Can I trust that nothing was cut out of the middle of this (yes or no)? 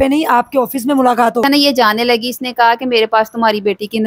no